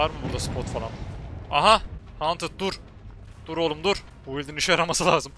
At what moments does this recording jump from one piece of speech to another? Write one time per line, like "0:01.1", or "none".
0:02.0
0:04.1

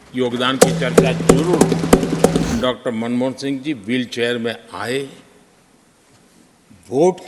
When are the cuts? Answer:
0:02.5

